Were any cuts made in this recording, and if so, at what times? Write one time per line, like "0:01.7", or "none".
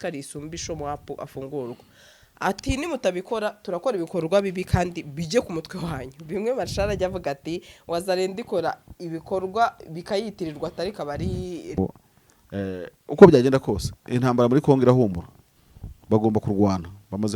0:11.8